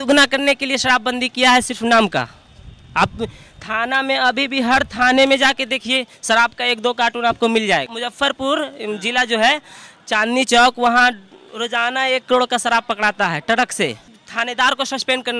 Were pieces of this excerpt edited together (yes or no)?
yes